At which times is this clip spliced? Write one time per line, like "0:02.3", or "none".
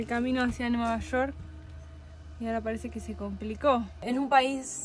0:03.9